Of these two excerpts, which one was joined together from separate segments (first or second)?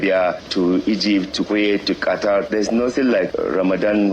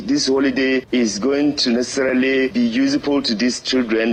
first